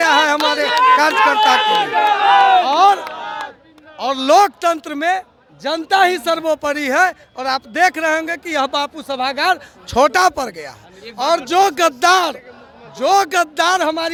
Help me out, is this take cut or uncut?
uncut